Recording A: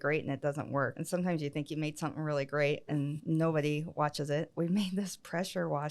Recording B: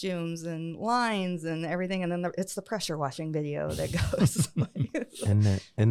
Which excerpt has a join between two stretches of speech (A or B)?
A